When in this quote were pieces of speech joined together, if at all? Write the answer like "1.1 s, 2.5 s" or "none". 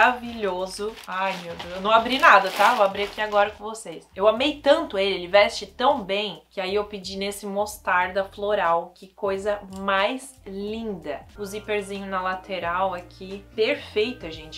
4.0 s, 11.3 s